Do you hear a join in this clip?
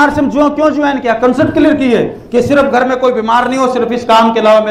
no; 0 cuts

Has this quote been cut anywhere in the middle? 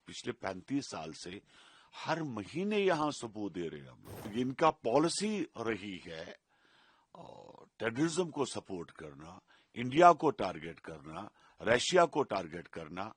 yes; 1 cut; at 4.2 s

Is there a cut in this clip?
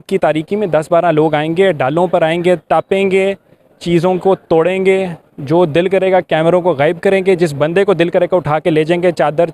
no; 0 cuts

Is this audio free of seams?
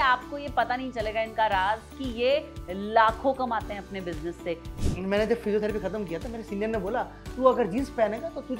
no; 1 cut; at 4.9 s

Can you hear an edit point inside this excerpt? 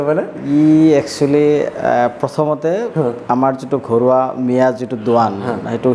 no; 0 cuts

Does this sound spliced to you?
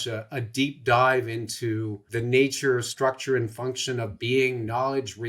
yes; 1 cut; at 2.0 s

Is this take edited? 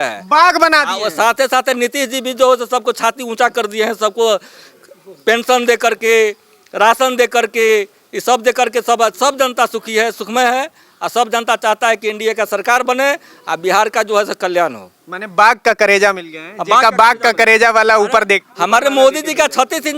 no; 0 cuts

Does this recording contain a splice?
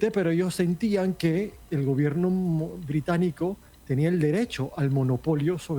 yes; 1 cut; at 3.7 s

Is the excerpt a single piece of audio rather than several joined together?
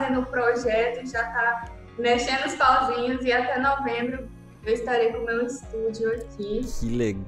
yes; 0 cuts

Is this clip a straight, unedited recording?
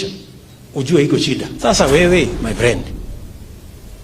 no; 1 cut; at 1.5 s

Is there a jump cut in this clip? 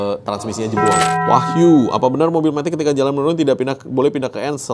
yes; 1 cut; at 1.2 s

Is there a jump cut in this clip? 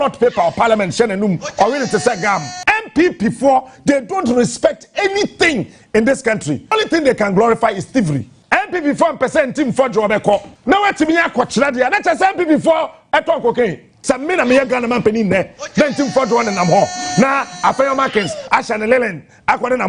yes; 5 cuts; at 2.5 s, 6.7 s, 8.3 s, 10.5 s, 13.9 s

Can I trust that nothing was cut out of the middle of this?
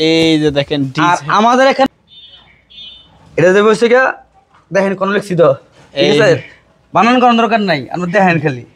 no; 1 cut; at 1.9 s

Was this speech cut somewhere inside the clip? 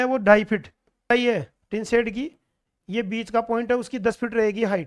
yes; 1 cut; at 1.1 s

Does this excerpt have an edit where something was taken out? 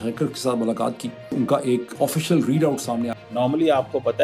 yes; 2 cuts; at 1.3 s, 3.1 s

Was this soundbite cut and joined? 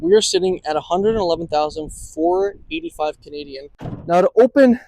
yes; 1 cut; at 3.9 s

